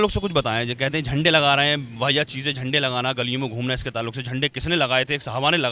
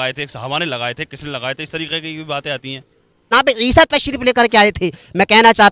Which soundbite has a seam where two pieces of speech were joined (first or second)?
second